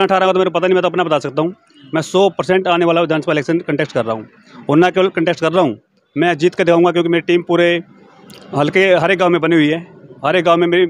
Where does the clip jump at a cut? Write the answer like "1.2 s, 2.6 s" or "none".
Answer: none